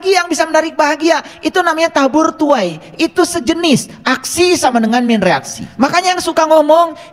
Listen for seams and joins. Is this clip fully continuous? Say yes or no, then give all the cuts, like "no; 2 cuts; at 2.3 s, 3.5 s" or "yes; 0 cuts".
no; 1 cut; at 5.6 s